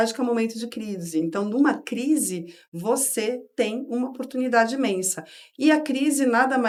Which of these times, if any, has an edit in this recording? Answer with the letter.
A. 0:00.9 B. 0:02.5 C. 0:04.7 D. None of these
D